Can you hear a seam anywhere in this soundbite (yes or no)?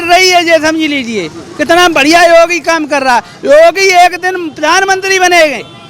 no